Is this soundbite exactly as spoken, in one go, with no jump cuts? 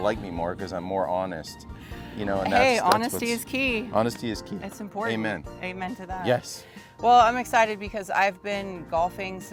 yes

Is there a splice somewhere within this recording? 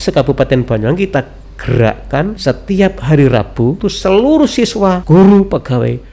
yes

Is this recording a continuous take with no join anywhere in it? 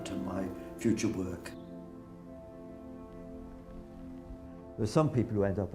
yes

